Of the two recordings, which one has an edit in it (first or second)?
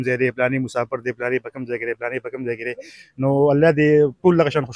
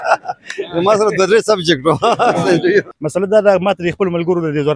second